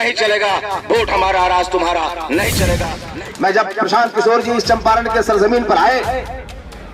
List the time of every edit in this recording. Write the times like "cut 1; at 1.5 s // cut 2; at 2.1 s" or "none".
cut 1; at 2.8 s